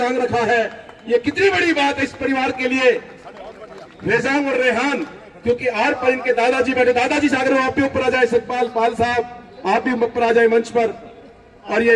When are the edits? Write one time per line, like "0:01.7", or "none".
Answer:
none